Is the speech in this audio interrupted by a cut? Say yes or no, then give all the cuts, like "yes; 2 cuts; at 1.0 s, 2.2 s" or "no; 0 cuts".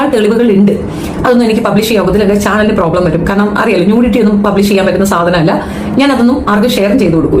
no; 0 cuts